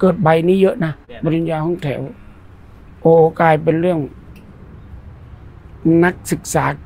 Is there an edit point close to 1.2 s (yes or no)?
yes